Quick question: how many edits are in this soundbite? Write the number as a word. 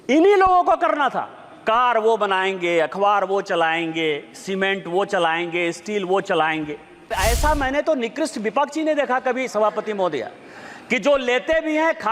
one